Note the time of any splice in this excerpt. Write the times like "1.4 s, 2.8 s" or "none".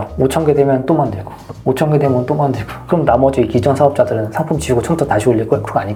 none